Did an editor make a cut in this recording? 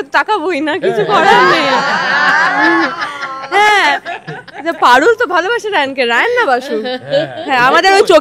no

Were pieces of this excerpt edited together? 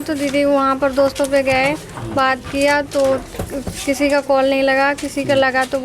no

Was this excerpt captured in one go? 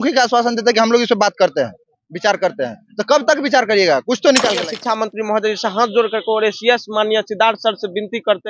no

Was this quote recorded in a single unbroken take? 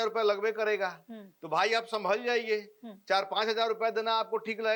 yes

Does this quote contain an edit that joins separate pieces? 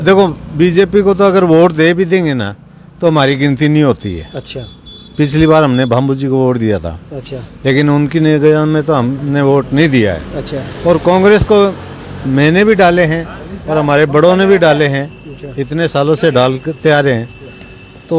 no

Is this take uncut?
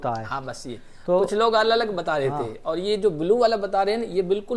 yes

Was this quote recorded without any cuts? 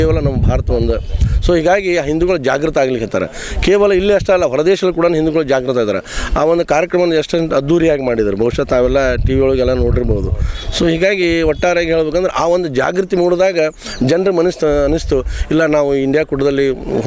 yes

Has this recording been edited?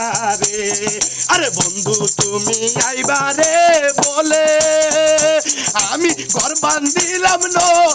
no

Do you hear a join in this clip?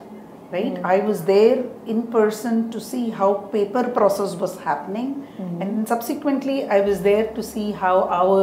no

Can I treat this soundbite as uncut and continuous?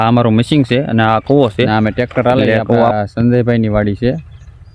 no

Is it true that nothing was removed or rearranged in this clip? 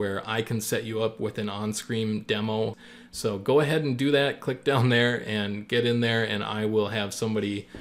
no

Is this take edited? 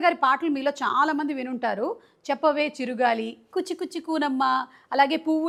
no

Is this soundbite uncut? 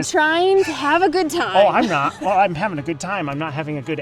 yes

